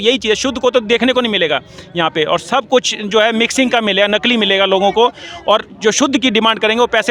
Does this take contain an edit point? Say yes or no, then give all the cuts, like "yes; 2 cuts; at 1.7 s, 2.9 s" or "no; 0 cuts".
no; 0 cuts